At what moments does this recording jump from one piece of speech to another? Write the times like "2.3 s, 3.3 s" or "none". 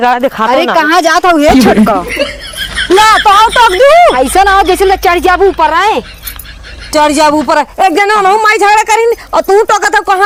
none